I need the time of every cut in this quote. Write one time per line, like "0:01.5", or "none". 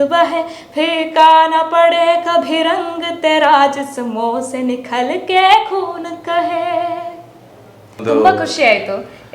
0:08.0